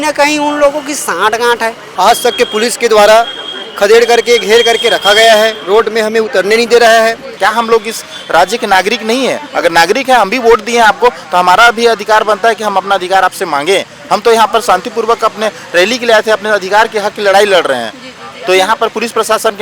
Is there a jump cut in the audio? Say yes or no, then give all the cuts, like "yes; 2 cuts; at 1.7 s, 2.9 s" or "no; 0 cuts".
yes; 2 cuts; at 1.8 s, 7.3 s